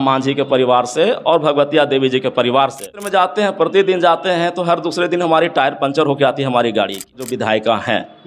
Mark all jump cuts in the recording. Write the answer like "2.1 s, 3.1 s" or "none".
3.0 s, 7.2 s